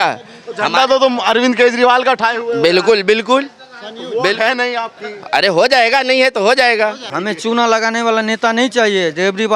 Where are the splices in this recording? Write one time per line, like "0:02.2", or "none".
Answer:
0:07.1